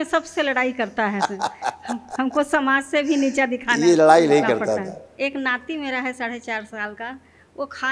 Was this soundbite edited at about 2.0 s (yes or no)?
no